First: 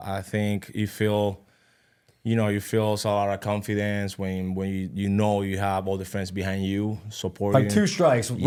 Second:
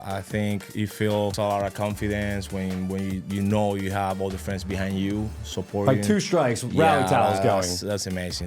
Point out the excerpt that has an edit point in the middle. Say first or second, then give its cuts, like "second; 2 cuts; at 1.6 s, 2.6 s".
second; 1 cut; at 1.3 s